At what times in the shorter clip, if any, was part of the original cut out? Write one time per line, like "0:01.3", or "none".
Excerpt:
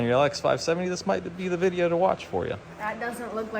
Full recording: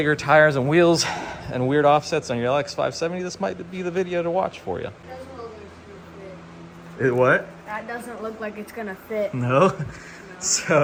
0:02.7